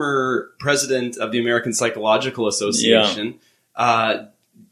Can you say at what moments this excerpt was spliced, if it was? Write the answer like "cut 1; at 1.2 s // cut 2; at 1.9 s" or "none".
none